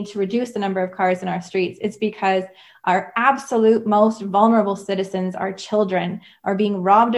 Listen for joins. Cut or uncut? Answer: uncut